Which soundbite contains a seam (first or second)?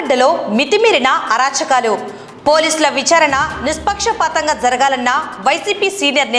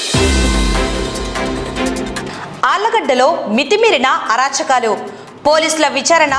second